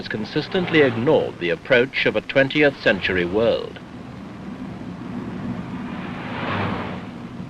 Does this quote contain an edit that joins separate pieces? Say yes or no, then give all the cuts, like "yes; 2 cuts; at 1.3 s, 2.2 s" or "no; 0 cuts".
no; 0 cuts